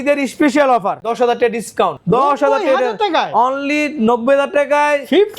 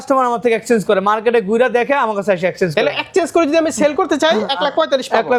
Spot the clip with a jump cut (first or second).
first